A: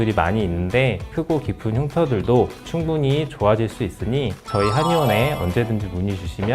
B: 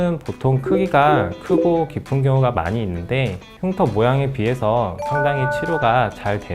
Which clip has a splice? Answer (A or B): A